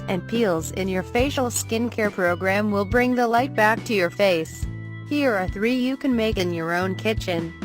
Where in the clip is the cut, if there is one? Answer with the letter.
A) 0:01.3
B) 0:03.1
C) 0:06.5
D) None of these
B